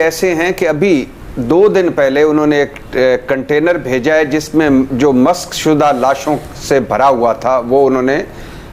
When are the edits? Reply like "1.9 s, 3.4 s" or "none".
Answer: none